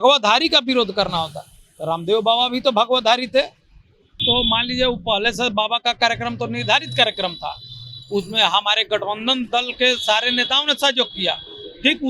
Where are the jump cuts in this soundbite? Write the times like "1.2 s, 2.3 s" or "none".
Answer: 4.2 s